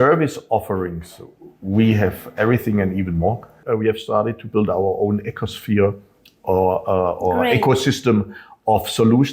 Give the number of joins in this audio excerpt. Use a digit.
1